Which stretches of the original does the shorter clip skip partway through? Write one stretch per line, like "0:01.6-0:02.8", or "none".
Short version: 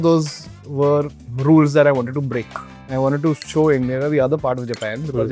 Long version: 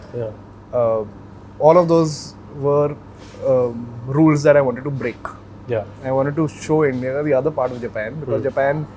0:03.1-0:03.9
0:05.5-0:05.9